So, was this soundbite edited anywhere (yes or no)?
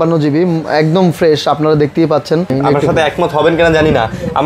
yes